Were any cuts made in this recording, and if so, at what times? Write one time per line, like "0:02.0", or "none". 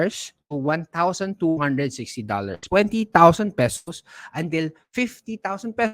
0:02.6